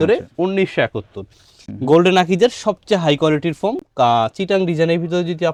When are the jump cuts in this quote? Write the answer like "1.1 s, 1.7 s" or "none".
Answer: none